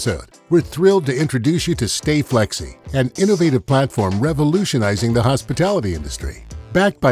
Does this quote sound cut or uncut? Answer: uncut